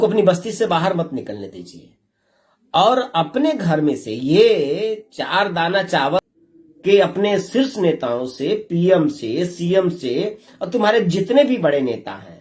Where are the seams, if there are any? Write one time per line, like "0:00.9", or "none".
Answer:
0:06.2